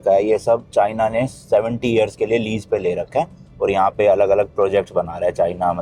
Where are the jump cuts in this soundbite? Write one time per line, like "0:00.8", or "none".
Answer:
none